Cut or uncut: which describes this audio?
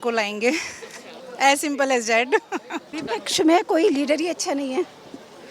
cut